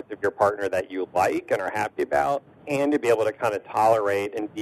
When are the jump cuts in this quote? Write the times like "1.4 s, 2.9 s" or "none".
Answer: 2.5 s